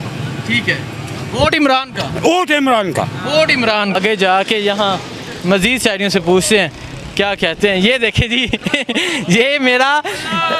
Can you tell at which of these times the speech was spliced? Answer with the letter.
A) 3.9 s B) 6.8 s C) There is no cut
A